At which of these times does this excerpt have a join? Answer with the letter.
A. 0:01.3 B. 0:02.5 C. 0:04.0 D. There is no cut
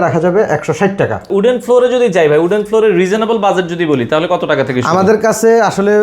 A